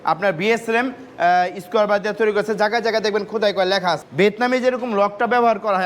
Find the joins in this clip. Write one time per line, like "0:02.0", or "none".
0:04.0